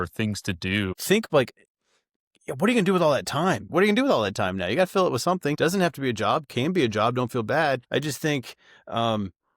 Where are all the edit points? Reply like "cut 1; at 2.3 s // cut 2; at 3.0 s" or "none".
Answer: cut 1; at 1.0 s // cut 2; at 3.7 s // cut 3; at 5.6 s // cut 4; at 7.8 s